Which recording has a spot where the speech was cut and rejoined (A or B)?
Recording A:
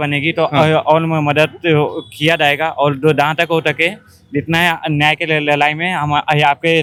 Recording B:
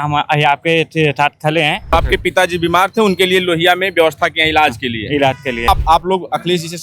B